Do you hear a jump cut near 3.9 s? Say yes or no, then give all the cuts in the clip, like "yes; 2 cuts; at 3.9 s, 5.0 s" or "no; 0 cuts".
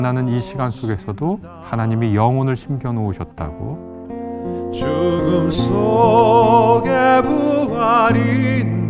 yes; 2 cuts; at 1.5 s, 3.9 s